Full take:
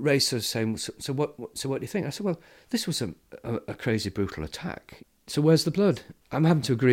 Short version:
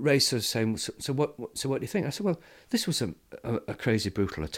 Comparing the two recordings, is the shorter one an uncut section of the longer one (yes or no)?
yes